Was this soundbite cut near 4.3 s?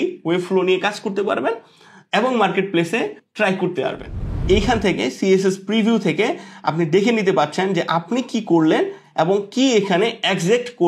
yes; 2 cuts; at 3.2 s, 4.3 s

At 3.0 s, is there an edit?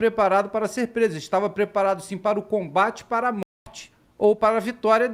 no; 0 cuts

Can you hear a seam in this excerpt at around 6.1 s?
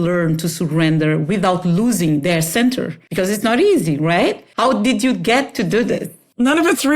yes; 3 cuts; at 3.0 s, 4.3 s, 6.1 s

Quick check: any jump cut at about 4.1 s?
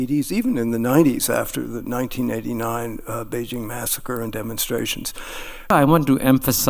no; 1 cut; at 5.7 s

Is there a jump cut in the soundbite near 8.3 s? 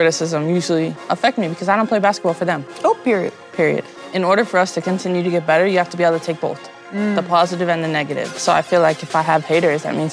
yes; 2 cuts; at 4.0 s, 8.3 s

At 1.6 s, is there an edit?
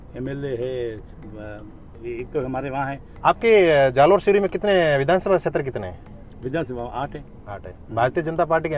no; 1 cut; at 3.1 s

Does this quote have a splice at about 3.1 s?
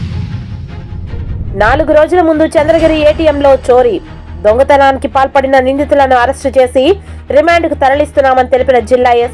no; 1 cut; at 1.4 s

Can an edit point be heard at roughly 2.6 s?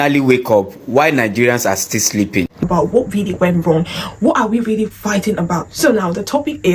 yes; 1 cut; at 2.6 s

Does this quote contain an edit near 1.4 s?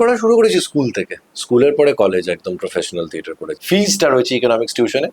no; 1 cut; at 3.5 s

